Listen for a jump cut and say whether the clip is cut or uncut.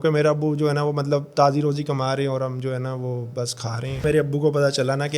cut